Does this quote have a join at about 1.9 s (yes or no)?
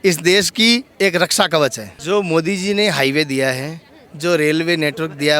yes